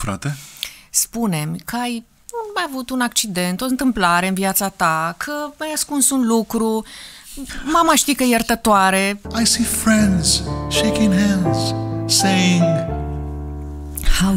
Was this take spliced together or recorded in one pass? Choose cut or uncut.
cut